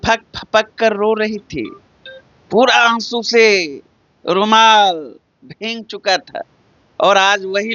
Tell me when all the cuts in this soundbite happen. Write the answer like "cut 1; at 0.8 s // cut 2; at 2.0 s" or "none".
none